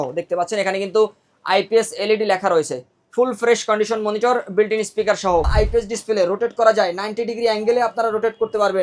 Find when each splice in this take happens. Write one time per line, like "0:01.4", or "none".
0:05.5

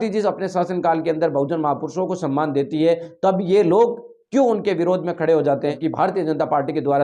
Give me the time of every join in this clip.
0:05.8

